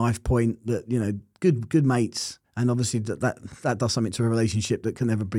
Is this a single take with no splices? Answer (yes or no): yes